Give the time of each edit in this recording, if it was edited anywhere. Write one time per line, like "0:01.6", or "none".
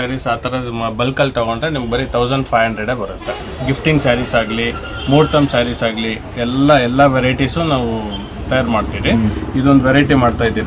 0:03.5